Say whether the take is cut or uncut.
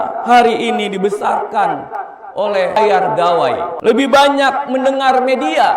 cut